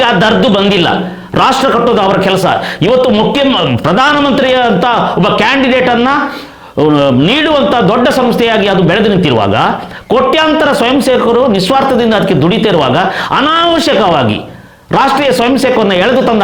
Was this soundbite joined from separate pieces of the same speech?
no; 0 cuts

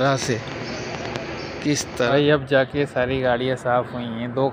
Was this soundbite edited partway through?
yes; 1 cut; at 2.1 s

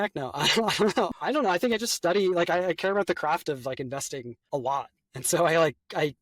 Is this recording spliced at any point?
yes; 1 cut; at 4.3 s

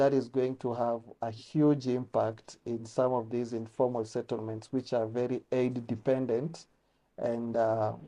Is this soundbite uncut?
yes; 0 cuts

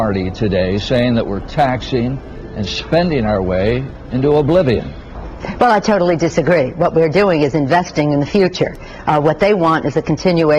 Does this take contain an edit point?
yes; 1 cut; at 9.2 s

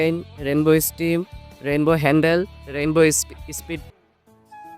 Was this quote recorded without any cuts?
no; 1 cut; at 3.9 s

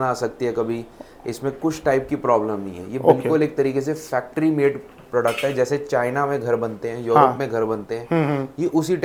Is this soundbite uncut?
yes; 0 cuts

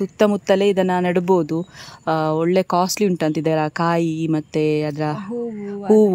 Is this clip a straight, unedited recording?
yes; 0 cuts

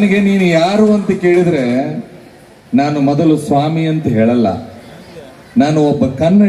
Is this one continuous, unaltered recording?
yes; 0 cuts

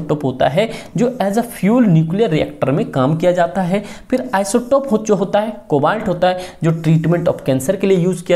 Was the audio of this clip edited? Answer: no; 0 cuts

